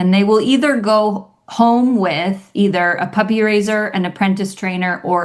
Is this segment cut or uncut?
uncut